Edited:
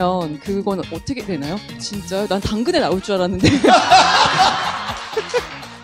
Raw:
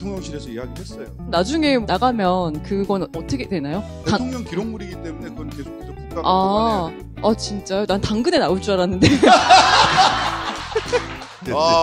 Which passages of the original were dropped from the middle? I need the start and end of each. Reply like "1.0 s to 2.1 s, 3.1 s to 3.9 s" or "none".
4.0 s to 7.4 s